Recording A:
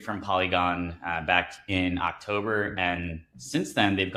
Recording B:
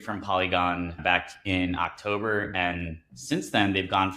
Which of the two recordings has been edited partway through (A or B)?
B